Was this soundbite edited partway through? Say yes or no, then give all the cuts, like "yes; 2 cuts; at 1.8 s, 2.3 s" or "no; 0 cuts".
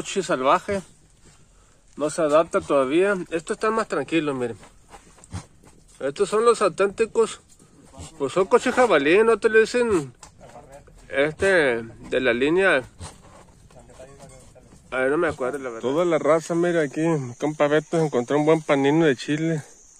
yes; 1 cut; at 15.7 s